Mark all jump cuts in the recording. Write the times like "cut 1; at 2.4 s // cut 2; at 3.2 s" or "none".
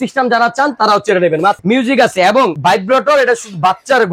cut 1; at 1.6 s // cut 2; at 2.6 s